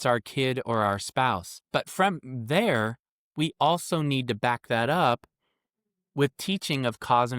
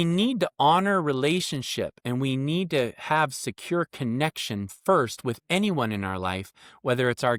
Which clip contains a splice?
first; 1 cut; at 1.5 s

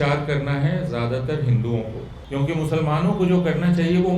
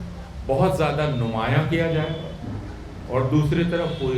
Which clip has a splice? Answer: first; 1 cut; at 2.1 s

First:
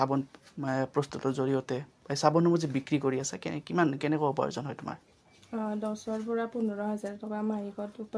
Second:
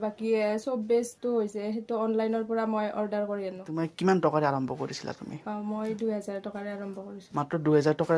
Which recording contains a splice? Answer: second; 1 cut; at 3.7 s

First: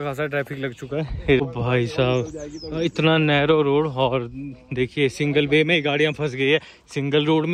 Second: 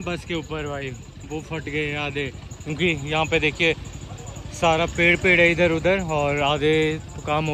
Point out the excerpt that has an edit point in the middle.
first; 1 cut; at 1.4 s

